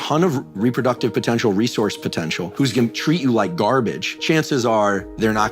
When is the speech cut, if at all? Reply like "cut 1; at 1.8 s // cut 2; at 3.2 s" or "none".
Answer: cut 1; at 2.5 s // cut 2; at 4.1 s